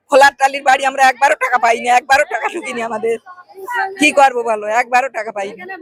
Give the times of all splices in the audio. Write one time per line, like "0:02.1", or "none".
none